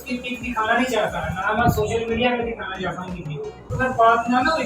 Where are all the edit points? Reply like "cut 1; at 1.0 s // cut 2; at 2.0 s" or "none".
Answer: cut 1; at 3.7 s